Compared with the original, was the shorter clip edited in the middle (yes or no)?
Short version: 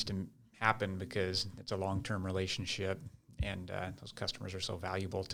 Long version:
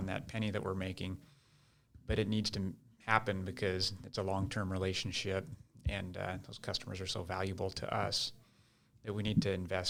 no